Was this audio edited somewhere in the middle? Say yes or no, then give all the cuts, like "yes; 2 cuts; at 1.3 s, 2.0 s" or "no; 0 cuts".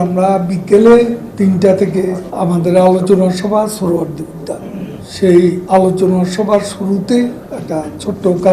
yes; 5 cuts; at 1.3 s, 2.3 s, 5.0 s, 5.6 s, 7.5 s